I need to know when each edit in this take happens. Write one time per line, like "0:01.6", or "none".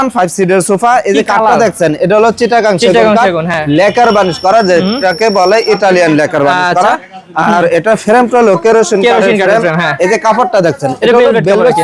none